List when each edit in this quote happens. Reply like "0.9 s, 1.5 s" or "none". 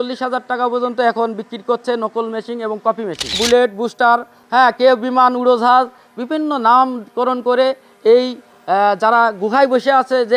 3.4 s